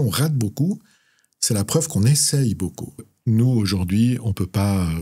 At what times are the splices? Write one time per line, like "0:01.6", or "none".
0:03.1